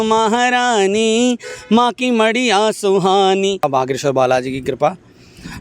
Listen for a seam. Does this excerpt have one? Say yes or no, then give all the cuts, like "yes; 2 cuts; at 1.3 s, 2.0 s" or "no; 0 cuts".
yes; 1 cut; at 3.6 s